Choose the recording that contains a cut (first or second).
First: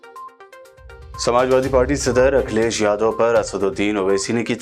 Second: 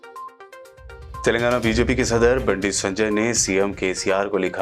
first